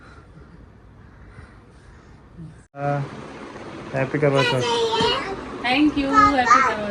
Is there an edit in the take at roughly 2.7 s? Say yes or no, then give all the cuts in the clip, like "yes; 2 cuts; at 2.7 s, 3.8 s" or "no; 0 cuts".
yes; 1 cut; at 2.7 s